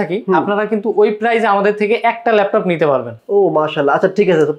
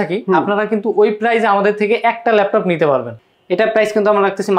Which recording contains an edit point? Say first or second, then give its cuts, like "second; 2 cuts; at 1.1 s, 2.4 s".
second; 1 cut; at 3.2 s